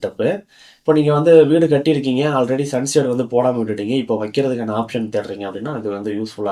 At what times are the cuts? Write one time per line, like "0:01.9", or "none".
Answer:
none